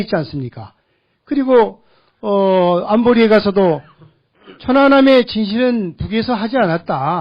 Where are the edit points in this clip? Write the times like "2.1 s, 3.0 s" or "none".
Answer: 6.1 s